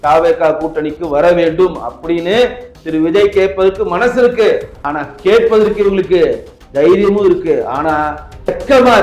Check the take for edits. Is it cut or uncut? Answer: cut